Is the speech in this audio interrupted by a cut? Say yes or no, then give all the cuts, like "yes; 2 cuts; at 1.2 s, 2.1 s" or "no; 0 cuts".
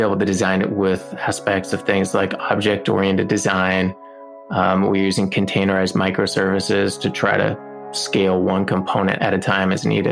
yes; 2 cuts; at 7.9 s, 9.2 s